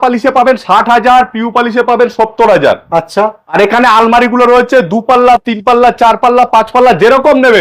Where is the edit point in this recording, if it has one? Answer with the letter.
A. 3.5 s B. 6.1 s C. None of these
A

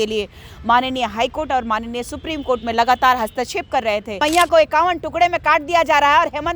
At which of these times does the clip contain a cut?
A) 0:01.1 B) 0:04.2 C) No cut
B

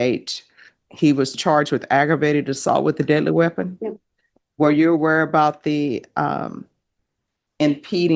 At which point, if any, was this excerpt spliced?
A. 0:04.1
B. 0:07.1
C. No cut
C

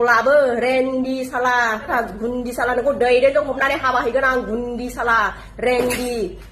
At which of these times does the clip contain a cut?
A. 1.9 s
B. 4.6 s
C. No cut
A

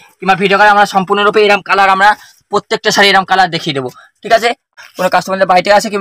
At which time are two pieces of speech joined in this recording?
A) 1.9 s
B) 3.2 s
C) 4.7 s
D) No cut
C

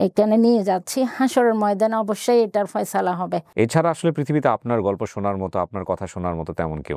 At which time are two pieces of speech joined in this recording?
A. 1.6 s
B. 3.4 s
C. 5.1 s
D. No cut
B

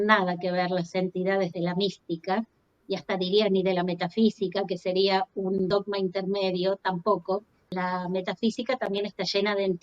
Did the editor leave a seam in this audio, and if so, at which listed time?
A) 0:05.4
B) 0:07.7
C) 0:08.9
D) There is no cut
B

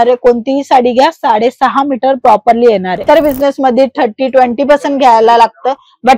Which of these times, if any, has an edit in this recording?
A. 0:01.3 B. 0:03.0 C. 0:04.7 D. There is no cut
B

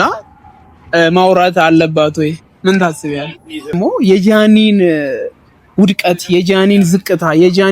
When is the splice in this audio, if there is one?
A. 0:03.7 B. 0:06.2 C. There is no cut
A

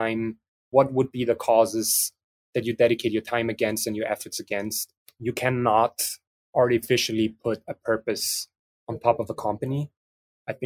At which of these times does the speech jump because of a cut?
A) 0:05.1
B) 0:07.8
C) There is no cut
A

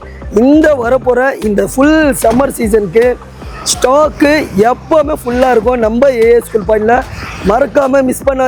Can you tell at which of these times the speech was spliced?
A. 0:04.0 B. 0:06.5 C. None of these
C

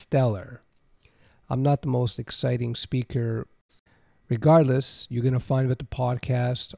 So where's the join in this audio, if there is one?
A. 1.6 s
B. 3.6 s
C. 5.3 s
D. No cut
B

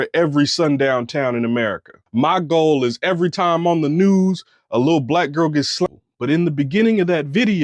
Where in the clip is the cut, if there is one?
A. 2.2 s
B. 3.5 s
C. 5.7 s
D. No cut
C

